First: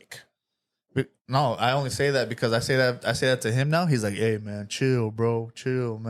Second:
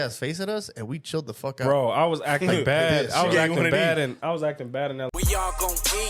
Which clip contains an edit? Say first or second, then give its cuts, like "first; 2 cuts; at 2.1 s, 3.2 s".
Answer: second; 1 cut; at 5.1 s